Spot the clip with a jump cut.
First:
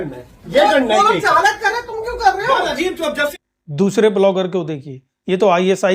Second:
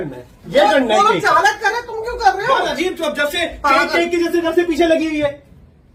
first; 1 cut; at 3.4 s

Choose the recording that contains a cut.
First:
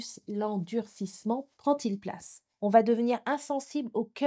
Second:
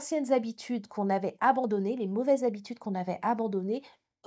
first; 1 cut; at 2.4 s

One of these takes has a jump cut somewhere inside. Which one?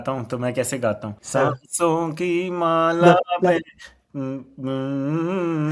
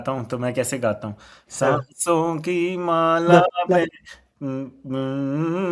first; 1 cut; at 1.1 s

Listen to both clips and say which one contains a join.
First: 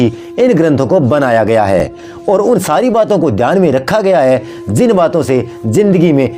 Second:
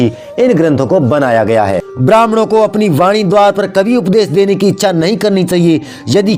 second; 1 cut; at 1.9 s

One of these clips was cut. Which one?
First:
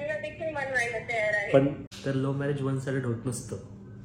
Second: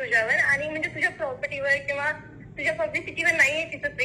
first; 1 cut; at 1.9 s

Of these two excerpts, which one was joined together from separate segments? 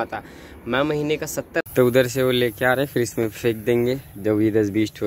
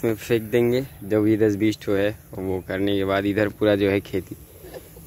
first; 1 cut; at 1.6 s

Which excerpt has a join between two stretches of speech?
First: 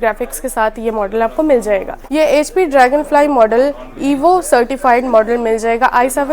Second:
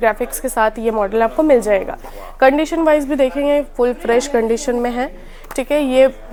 first; 1 cut; at 2.0 s

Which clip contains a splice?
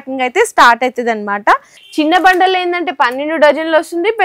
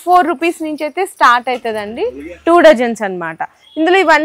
first; 1 cut; at 1.8 s

